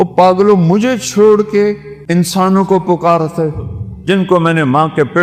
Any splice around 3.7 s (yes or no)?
no